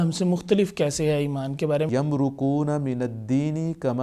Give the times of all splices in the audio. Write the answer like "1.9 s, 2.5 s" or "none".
1.9 s

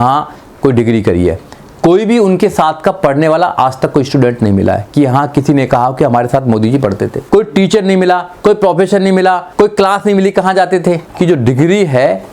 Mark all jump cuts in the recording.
7.1 s, 9.5 s, 11.1 s

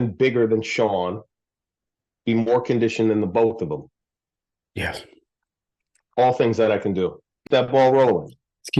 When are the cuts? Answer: 7.5 s

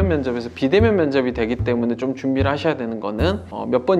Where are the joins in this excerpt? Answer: none

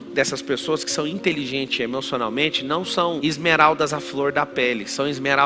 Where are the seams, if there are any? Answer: none

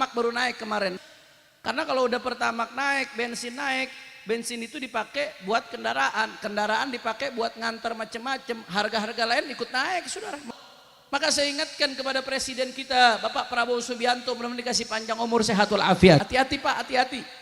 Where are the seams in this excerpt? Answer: 0.9 s, 10.4 s, 16.2 s

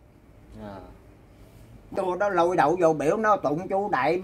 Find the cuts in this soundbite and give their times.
1.8 s

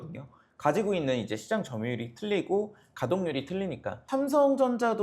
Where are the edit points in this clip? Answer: 4.0 s

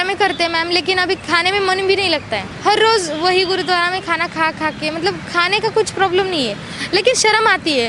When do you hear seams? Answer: 2.4 s

